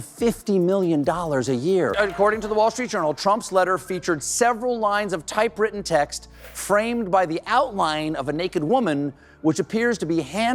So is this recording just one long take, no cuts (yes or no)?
no